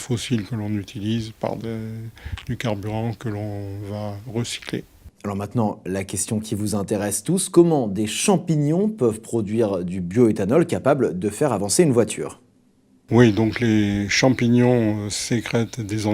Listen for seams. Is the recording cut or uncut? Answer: cut